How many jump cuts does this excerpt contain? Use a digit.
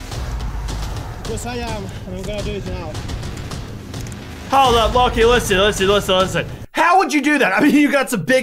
0